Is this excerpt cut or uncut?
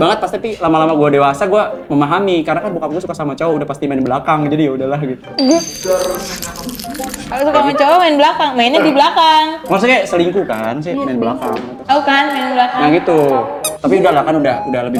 uncut